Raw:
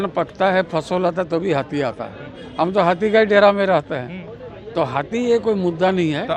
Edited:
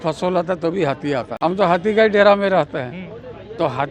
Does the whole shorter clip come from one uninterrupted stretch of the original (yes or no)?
no